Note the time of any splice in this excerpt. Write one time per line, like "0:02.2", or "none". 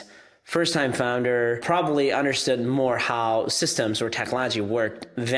0:01.6